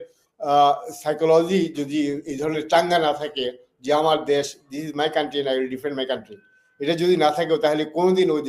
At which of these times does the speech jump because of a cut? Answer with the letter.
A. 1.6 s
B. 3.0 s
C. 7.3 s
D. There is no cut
D